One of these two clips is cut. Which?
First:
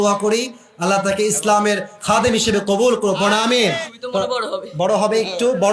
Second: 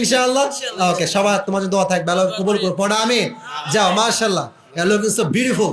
first; 1 cut; at 3.8 s

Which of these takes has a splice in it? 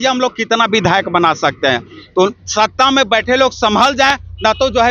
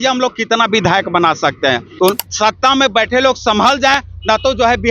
second; 1 cut; at 1.9 s

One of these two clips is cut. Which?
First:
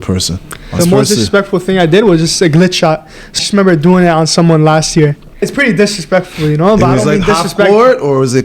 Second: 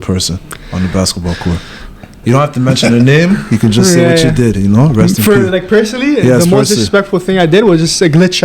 first; 3 cuts; at 0.8 s, 3.3 s, 5.5 s

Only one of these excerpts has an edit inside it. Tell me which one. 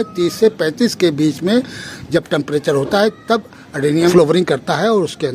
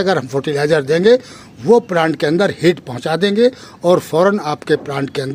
first; 1 cut; at 4.1 s

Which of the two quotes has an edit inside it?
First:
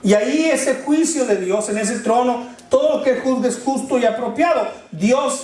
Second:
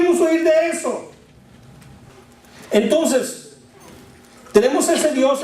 second; 1 cut; at 2.1 s

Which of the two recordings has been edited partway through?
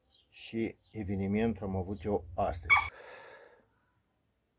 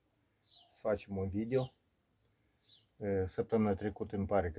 first; 1 cut; at 2.9 s

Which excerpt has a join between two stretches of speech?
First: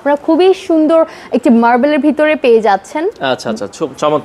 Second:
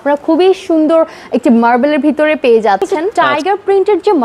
second; 1 cut; at 3.1 s

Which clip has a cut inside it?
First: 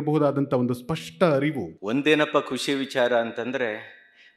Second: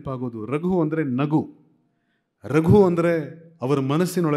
first; 1 cut; at 1.7 s

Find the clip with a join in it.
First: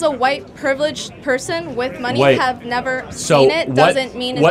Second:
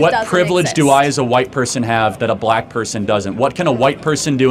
first; 1 cut; at 2.6 s

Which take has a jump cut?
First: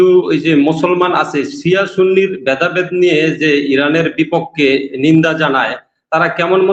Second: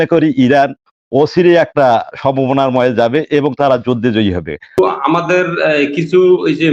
second; 1 cut; at 4.8 s

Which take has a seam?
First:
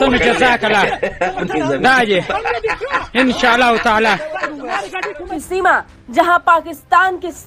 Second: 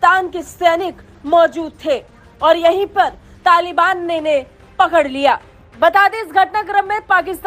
first; 1 cut; at 5.4 s

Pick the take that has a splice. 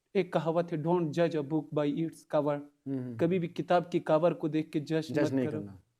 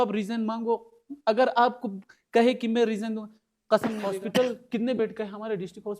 second; 1 cut; at 4.1 s

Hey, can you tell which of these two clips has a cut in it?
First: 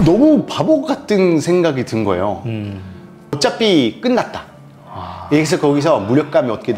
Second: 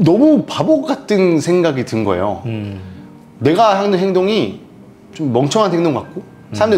first; 1 cut; at 3.4 s

